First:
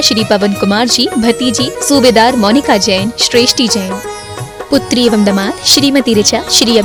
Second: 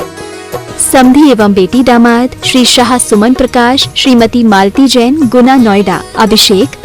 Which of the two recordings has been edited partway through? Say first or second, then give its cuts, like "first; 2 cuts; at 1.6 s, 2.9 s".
second; 1 cut; at 0.9 s